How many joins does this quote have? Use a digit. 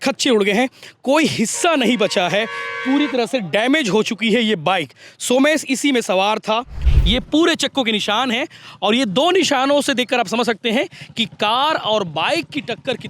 1